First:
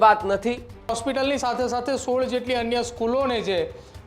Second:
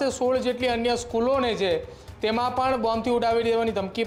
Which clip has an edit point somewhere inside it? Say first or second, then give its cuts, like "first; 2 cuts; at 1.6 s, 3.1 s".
first; 1 cut; at 1.0 s